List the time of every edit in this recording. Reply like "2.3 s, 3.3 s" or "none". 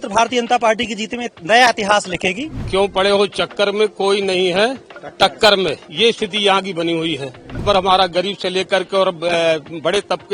2.6 s, 7.6 s